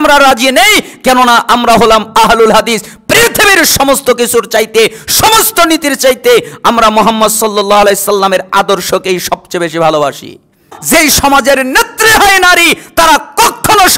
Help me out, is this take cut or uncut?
cut